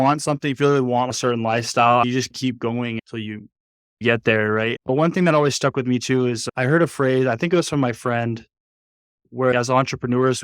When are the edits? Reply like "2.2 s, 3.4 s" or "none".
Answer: 1.1 s, 4.0 s, 9.5 s